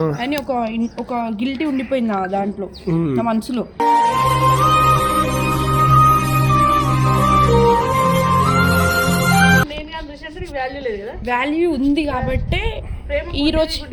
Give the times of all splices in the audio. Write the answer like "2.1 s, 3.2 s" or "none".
9.7 s